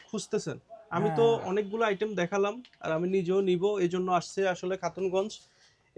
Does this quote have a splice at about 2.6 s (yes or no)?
no